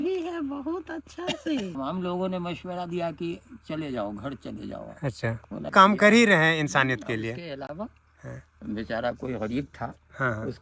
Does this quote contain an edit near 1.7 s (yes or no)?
yes